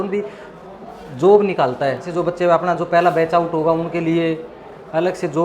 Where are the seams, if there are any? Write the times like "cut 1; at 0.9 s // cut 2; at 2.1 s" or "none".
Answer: cut 1; at 2.1 s